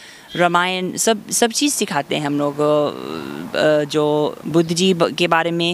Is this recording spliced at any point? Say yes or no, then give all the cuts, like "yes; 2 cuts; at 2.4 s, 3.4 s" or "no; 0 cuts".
no; 0 cuts